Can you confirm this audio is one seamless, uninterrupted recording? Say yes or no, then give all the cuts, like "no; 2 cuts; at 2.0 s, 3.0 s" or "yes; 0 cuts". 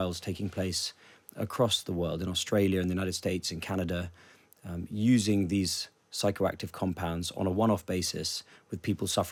yes; 0 cuts